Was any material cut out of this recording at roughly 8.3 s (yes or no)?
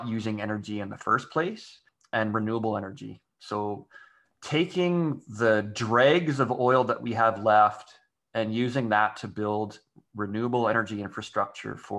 no